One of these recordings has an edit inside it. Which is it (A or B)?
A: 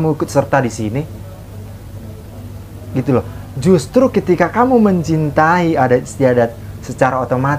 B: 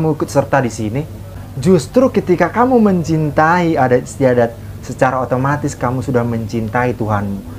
B